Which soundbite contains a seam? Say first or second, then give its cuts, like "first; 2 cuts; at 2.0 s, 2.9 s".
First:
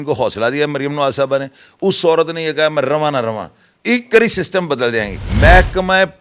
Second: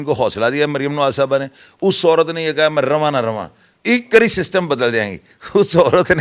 first; 1 cut; at 5.2 s